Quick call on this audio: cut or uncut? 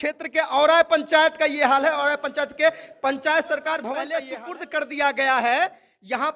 cut